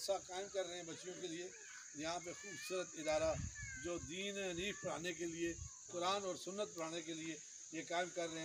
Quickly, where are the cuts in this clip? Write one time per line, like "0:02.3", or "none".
none